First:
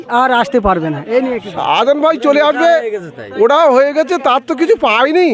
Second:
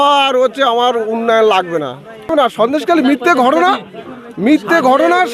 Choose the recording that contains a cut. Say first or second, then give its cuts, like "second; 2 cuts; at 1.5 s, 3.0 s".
second; 1 cut; at 2.3 s